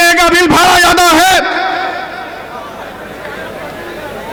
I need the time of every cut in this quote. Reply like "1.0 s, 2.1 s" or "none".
none

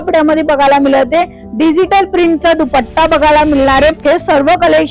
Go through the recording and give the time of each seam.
4.0 s

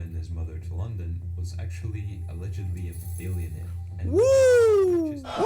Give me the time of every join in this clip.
none

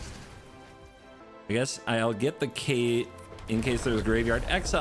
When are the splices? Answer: 1.2 s

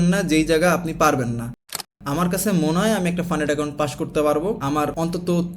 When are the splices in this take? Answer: 1.8 s

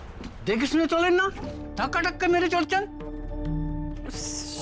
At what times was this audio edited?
none

